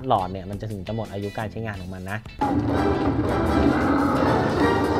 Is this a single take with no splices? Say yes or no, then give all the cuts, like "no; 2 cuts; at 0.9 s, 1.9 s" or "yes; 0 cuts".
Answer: no; 1 cut; at 2.4 s